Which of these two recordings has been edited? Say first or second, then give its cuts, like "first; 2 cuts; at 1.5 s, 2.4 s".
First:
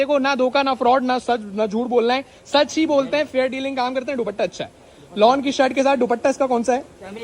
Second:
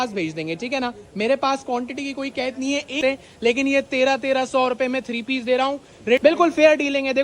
second; 2 cuts; at 3.0 s, 6.2 s